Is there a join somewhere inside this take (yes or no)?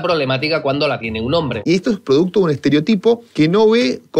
yes